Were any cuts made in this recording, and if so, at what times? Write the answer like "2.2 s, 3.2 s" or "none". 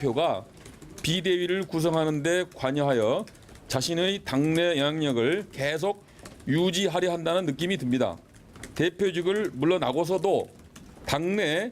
3.8 s